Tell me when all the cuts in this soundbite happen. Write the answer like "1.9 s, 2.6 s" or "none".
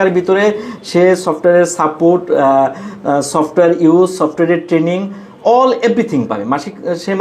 none